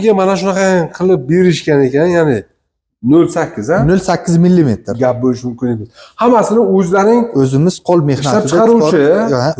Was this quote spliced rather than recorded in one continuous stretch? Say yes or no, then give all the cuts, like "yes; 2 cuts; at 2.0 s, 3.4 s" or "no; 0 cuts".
no; 0 cuts